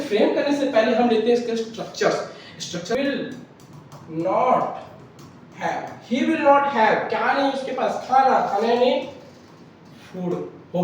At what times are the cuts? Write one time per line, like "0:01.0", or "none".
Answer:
0:02.9